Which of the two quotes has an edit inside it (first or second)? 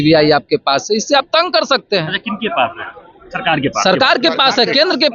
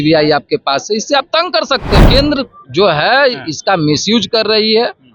second